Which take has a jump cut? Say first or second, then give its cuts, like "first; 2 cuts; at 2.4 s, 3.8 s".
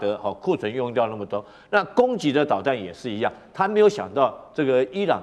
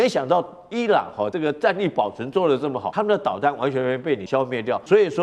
second; 3 cuts; at 1.3 s, 2.8 s, 4.4 s